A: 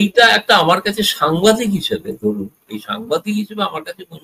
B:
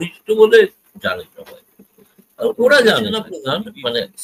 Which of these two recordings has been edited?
B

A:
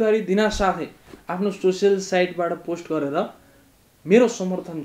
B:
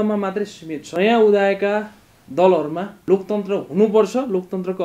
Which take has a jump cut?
B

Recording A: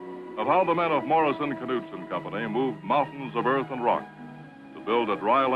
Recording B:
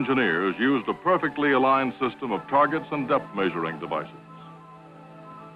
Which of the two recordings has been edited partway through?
A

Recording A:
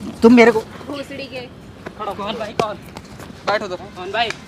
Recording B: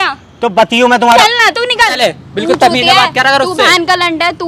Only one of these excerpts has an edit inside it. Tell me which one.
B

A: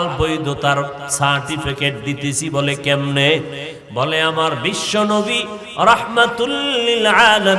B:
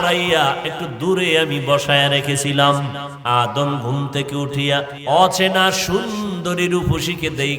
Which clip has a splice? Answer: B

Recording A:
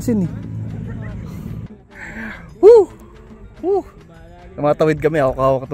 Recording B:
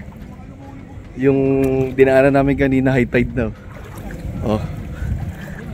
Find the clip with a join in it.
A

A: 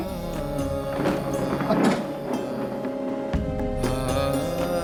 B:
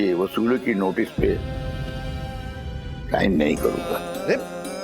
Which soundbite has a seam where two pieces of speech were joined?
B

